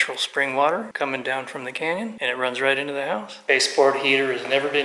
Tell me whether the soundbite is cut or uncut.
cut